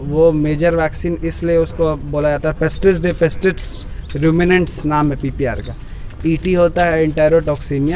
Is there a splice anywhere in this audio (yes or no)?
no